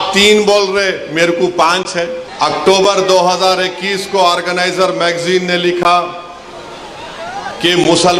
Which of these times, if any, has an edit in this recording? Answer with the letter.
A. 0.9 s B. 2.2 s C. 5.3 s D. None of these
B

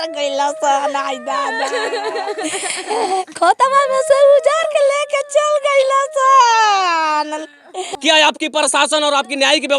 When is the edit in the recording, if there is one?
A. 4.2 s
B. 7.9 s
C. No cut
B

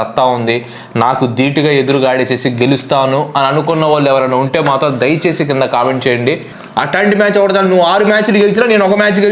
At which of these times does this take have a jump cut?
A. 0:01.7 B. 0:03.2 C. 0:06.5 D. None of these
C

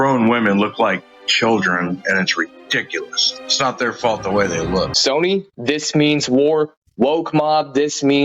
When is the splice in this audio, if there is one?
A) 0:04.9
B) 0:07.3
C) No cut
A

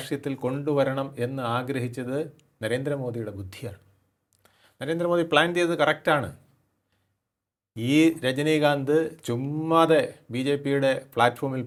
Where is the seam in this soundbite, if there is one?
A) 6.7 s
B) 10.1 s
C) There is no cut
C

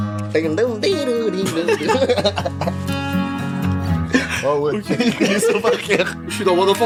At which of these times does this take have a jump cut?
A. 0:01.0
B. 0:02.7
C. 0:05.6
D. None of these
D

